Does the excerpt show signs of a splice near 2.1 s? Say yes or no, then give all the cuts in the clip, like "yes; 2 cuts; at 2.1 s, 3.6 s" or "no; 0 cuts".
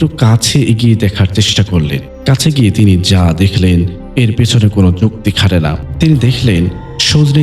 yes; 2 cuts; at 2.1 s, 5.8 s